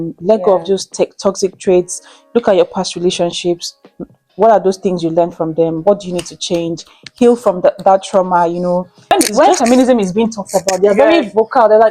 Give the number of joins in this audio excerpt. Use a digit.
1